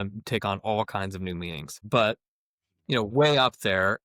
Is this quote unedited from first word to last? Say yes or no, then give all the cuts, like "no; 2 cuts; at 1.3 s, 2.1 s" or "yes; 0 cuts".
no; 1 cut; at 1.8 s